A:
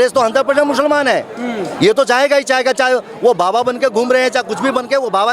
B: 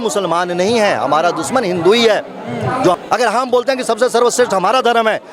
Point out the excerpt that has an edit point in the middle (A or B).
B